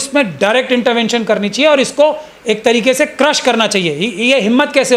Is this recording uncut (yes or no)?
yes